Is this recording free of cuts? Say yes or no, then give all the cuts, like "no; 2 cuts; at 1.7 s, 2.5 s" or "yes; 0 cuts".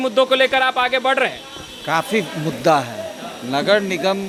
yes; 0 cuts